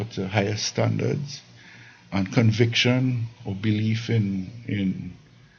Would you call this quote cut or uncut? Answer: uncut